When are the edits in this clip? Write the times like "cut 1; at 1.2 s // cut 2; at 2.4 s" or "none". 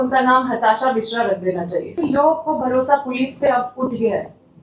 cut 1; at 1.9 s